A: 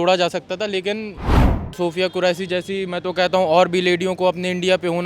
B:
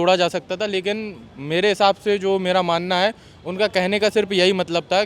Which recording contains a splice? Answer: A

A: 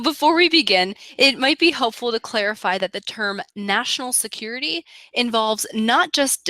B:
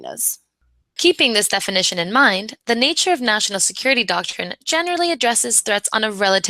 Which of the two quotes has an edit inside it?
A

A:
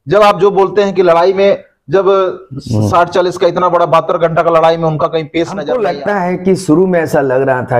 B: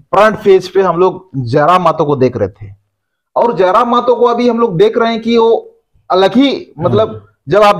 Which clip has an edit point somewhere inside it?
A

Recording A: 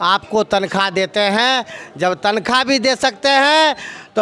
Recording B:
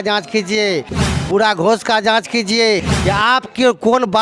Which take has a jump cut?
B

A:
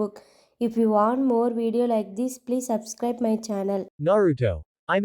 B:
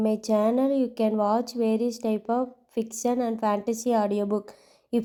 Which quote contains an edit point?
A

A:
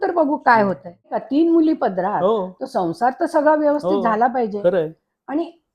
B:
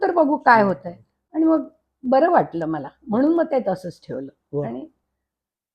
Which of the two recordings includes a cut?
A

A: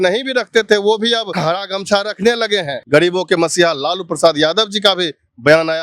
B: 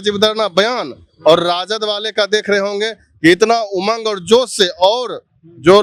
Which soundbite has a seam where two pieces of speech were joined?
A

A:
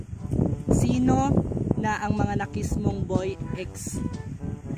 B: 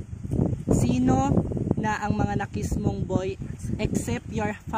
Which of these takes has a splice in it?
B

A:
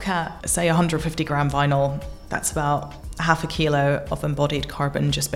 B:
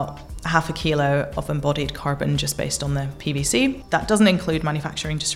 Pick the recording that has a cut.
B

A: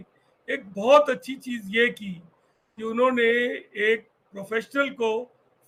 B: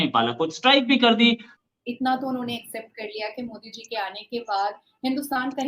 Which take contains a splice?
B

